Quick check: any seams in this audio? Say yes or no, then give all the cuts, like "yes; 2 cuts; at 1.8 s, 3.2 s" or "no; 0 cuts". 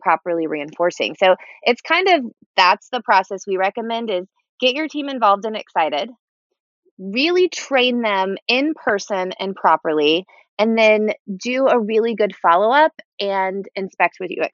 no; 0 cuts